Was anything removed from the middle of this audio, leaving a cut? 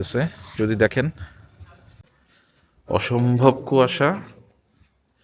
yes; 1 cut; at 2.0 s

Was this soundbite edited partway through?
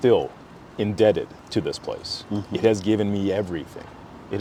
no; 0 cuts

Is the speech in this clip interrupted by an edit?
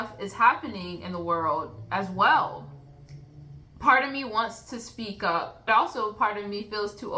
yes; 1 cut; at 5.6 s

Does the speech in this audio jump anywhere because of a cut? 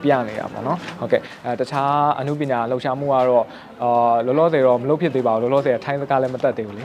no; 0 cuts

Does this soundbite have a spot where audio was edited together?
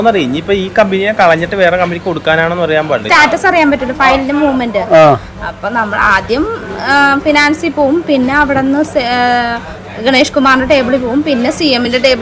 yes; 1 cut; at 3.1 s

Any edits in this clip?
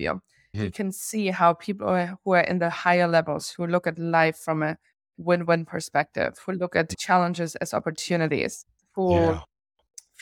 no; 0 cuts

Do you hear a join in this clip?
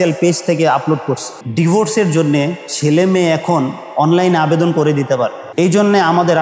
yes; 2 cuts; at 1.4 s, 5.4 s

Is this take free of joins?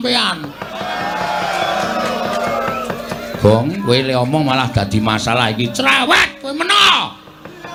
yes; 0 cuts

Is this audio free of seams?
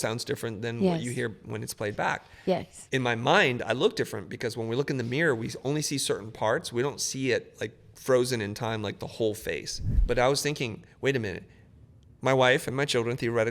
no; 1 cut; at 2.7 s

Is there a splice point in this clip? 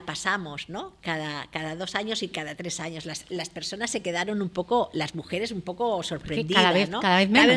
no; 0 cuts

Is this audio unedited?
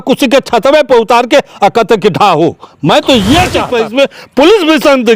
no; 1 cut; at 3.7 s

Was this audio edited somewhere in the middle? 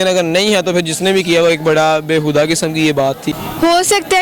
yes; 1 cut; at 3.2 s

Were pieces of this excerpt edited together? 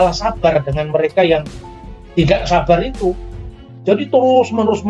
no; 0 cuts

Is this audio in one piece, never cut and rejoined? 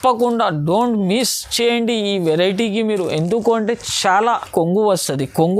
no; 1 cut; at 4.4 s

